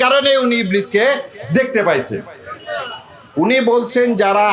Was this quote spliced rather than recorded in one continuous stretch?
no; 0 cuts

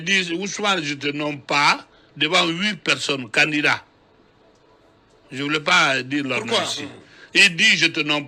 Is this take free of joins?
yes; 0 cuts

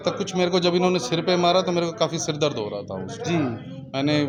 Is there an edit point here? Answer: no; 0 cuts

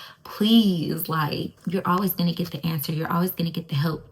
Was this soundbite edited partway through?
yes; 1 cut; at 1.5 s

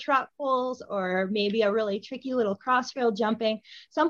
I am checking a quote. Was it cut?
no; 0 cuts

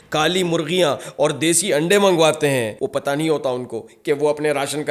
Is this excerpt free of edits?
no; 1 cut; at 2.7 s

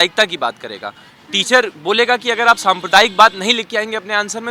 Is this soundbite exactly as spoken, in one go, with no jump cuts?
yes; 0 cuts

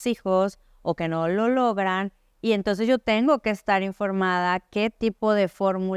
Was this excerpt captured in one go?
yes; 0 cuts

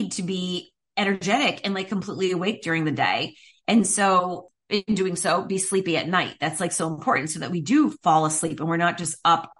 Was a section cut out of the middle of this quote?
yes; 1 cut; at 4.4 s

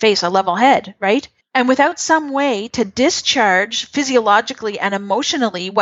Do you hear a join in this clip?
yes; 1 cut; at 1.4 s

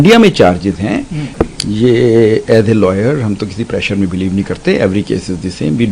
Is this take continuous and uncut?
no; 1 cut; at 1.2 s

